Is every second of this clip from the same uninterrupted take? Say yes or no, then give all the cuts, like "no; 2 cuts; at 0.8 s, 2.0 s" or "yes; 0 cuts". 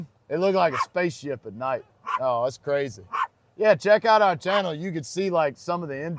yes; 0 cuts